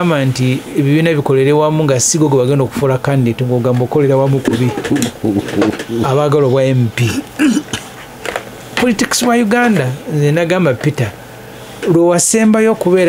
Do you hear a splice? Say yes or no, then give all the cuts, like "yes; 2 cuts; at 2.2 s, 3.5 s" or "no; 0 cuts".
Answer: no; 0 cuts